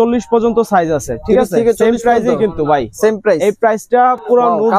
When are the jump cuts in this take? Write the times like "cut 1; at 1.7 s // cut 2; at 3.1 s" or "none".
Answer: none